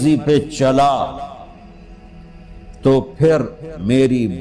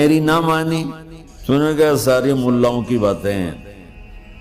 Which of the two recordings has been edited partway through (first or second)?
second